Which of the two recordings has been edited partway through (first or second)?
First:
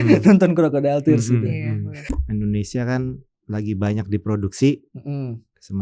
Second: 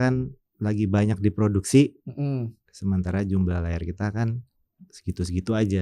first